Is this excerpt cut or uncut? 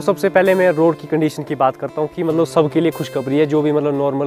uncut